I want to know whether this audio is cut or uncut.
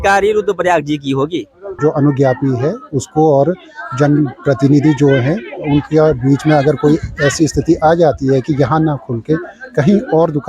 cut